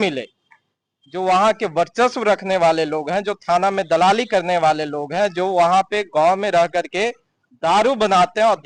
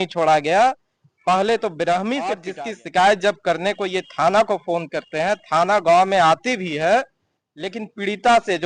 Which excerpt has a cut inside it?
second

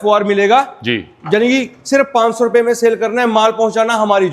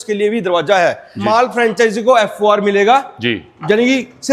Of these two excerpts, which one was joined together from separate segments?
second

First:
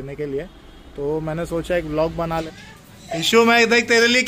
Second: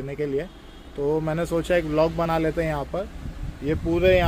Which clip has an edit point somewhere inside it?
first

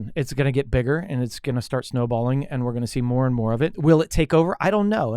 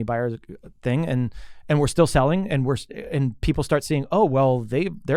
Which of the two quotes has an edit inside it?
first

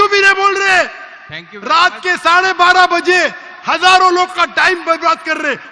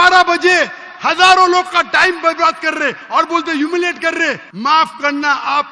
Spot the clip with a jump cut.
second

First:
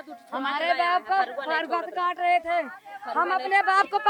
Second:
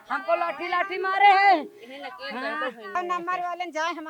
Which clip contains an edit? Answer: second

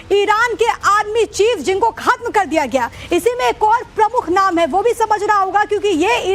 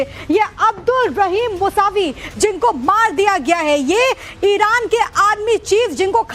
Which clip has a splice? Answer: first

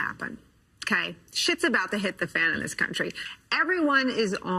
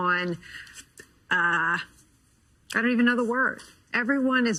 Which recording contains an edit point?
first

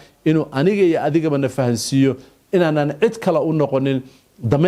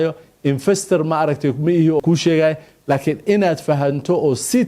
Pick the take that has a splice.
second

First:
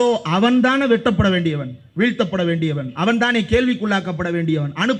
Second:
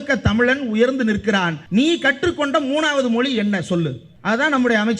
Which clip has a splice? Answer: second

